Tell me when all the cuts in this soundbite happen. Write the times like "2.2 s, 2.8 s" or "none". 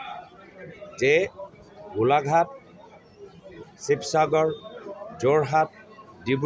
none